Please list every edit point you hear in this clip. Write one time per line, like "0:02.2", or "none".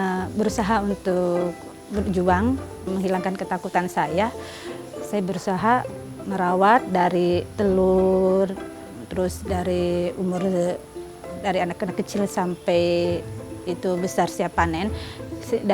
0:02.9